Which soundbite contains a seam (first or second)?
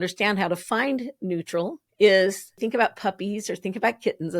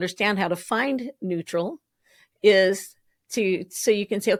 first